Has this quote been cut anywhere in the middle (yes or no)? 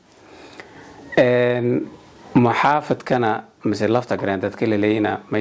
no